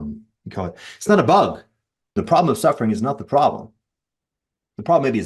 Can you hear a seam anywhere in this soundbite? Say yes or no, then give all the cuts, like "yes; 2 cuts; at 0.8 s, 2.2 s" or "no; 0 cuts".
yes; 1 cut; at 2.2 s